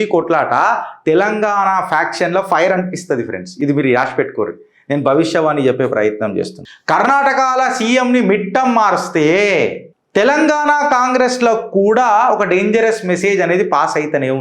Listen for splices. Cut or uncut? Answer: uncut